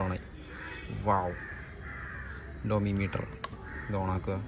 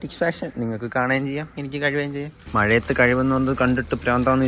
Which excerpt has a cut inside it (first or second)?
second